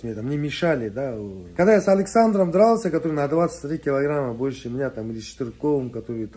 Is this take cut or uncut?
cut